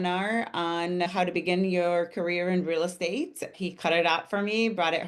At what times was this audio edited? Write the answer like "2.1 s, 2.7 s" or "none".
1.1 s